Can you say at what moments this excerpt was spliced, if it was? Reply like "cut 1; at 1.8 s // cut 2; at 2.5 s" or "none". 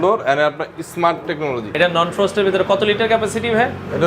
cut 1; at 1.8 s